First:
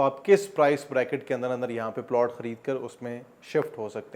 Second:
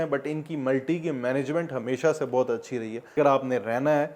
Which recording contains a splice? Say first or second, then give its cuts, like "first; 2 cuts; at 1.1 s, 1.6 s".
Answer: second; 1 cut; at 3.1 s